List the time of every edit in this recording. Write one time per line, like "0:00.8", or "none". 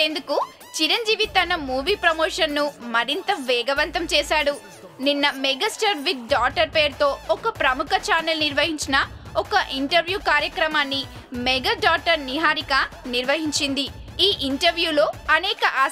0:04.6

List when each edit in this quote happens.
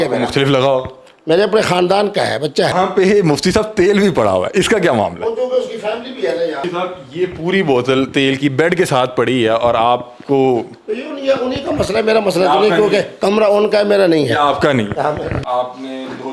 0:02.7
0:06.6
0:15.3

